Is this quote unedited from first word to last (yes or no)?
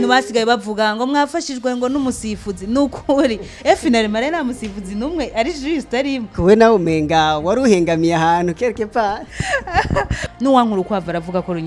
no